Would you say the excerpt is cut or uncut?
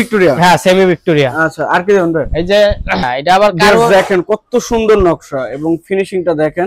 cut